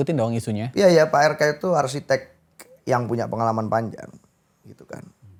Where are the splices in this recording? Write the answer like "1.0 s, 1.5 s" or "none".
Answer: none